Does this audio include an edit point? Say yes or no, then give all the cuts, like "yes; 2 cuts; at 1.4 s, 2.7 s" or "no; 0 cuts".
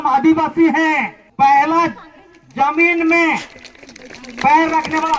yes; 1 cut; at 1.2 s